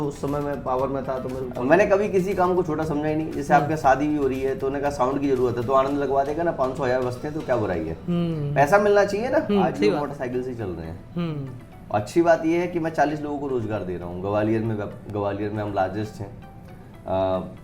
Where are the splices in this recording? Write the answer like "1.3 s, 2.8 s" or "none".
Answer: 1.4 s, 10.1 s